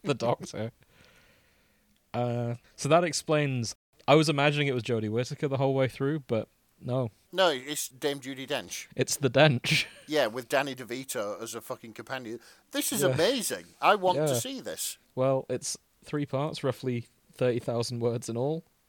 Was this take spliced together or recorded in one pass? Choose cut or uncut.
cut